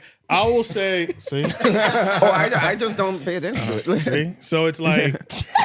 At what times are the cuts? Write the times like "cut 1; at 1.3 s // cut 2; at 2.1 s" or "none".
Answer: none